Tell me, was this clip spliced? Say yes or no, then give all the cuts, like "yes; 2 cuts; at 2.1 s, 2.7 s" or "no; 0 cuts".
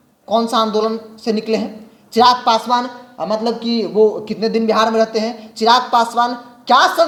no; 0 cuts